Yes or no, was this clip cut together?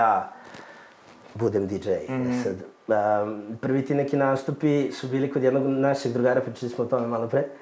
no